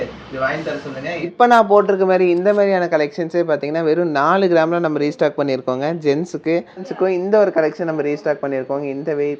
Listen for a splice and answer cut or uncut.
cut